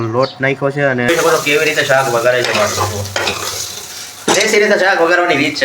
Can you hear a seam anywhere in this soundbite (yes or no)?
yes